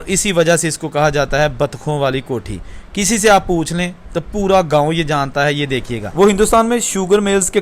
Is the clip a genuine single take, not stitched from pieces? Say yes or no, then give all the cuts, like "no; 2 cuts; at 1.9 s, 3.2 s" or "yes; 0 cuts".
no; 1 cut; at 6.0 s